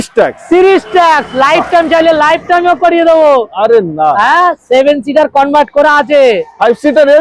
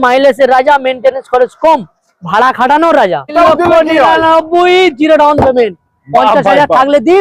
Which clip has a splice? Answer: second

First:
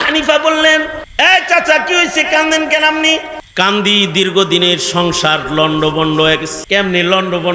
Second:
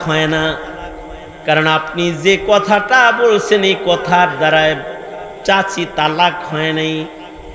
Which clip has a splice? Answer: first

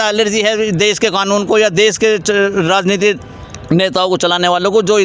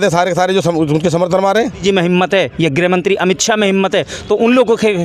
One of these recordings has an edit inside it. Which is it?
second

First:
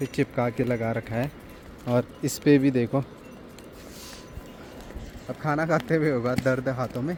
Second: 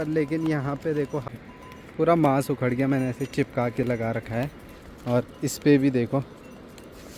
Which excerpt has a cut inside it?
second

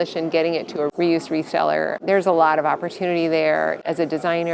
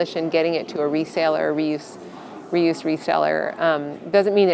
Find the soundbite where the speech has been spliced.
first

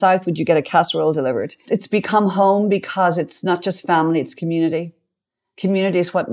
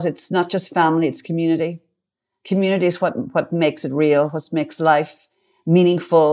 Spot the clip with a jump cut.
first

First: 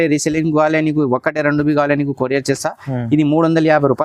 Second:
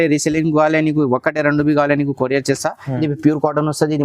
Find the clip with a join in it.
second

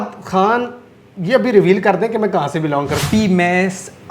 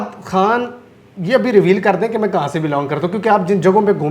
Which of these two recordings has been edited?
first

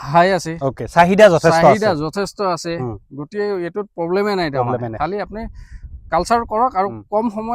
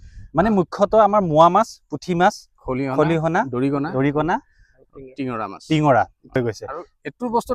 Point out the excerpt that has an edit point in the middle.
second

